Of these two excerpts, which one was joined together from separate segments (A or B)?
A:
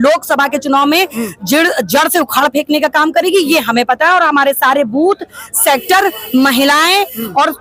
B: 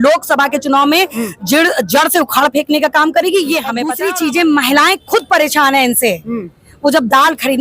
B